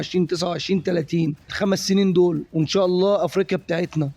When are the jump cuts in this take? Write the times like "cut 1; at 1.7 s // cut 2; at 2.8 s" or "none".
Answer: cut 1; at 1.4 s